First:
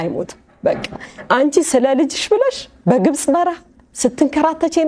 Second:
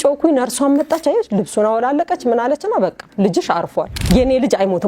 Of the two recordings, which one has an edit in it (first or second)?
second